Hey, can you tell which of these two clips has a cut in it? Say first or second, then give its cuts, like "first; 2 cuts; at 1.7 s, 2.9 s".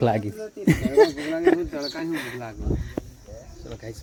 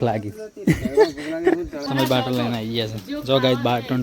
second; 1 cut; at 1.9 s